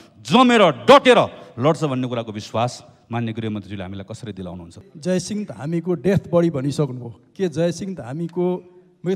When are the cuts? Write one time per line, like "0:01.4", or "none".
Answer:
0:04.8